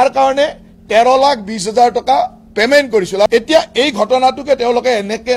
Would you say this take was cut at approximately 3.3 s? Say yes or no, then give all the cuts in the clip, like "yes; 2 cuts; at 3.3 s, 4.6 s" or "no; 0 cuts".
yes; 1 cut; at 3.3 s